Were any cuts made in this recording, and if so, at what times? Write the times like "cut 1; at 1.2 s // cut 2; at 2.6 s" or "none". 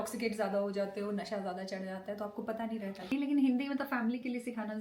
cut 1; at 2.9 s